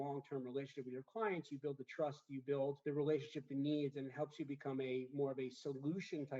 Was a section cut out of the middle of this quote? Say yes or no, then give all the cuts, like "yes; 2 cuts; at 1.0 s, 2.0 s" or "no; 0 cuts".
yes; 1 cut; at 2.8 s